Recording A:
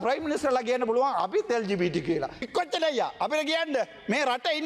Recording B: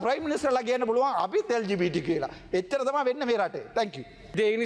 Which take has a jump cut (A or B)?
A